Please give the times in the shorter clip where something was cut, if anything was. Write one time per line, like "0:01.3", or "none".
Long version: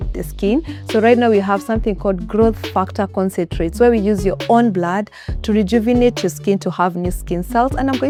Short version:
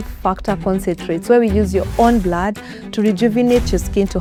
none